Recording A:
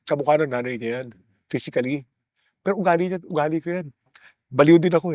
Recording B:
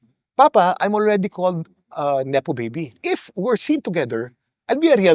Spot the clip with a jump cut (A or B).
B